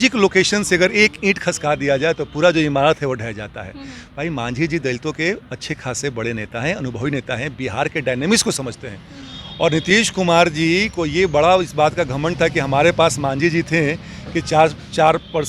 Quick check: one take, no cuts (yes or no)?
yes